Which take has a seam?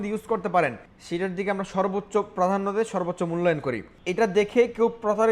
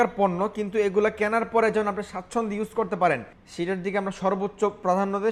first; 1 cut; at 4.0 s

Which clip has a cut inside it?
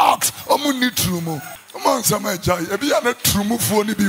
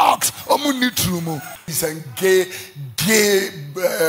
second; 1 cut; at 1.7 s

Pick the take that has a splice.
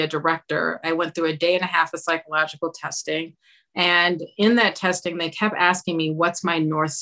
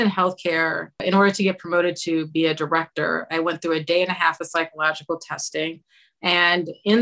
second; 1 cut; at 1.0 s

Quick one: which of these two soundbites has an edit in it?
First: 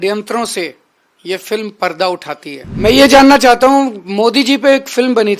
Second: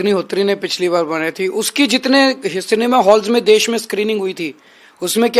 first; 1 cut; at 2.8 s

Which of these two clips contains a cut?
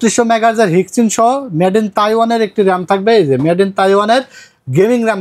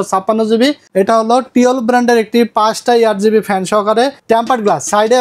second; 2 cuts; at 0.8 s, 4.2 s

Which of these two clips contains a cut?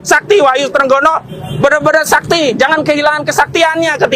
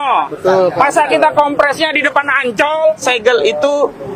second; 1 cut; at 3.0 s

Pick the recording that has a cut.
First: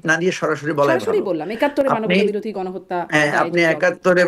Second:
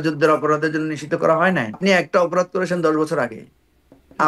second; 1 cut; at 1.8 s

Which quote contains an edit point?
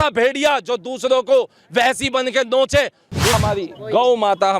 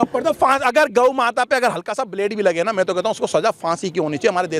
first; 1 cut; at 3.4 s

